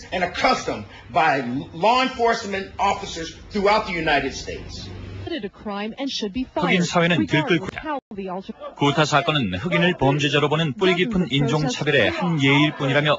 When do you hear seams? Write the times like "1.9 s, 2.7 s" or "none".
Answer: 4.3 s